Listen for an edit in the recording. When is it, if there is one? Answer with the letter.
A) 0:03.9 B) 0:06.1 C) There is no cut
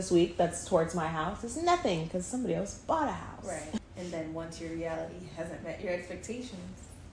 A